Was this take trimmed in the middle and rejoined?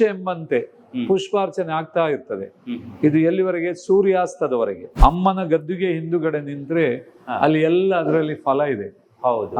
yes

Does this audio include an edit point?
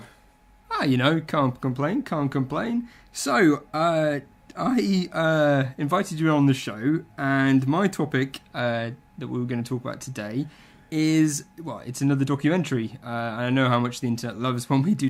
no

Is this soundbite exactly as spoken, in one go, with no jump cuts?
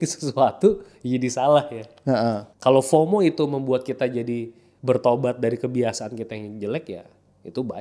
no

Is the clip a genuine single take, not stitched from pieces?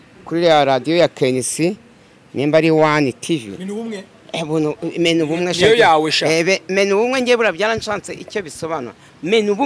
yes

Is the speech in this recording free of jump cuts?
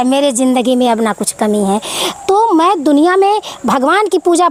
yes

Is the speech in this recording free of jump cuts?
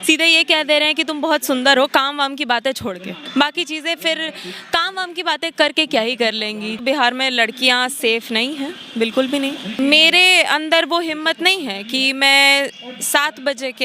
no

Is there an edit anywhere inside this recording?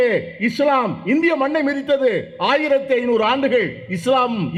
no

